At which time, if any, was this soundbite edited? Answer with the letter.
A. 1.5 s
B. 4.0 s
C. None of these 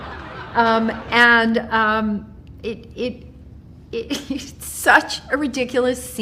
C